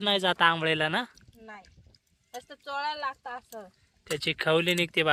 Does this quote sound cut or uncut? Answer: uncut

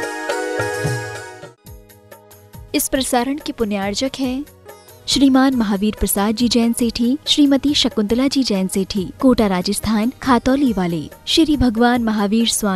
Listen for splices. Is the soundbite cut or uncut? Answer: cut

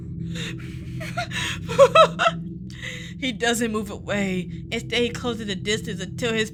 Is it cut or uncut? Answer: uncut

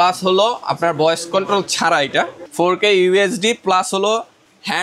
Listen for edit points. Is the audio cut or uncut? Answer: cut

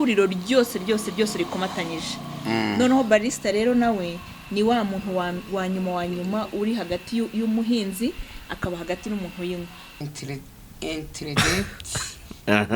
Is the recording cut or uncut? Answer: cut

